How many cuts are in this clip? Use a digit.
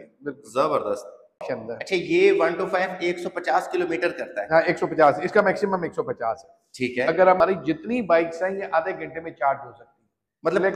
2